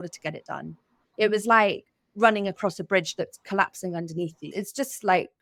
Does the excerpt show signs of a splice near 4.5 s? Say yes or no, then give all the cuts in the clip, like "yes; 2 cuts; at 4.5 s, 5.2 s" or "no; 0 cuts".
yes; 2 cuts; at 1.0 s, 4.5 s